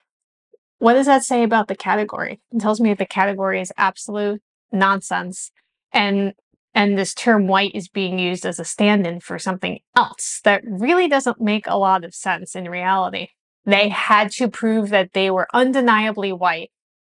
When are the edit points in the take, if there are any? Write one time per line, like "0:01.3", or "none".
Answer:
0:13.6